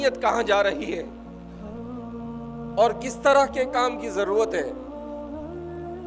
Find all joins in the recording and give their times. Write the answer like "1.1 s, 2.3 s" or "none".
1.1 s, 2.5 s, 4.8 s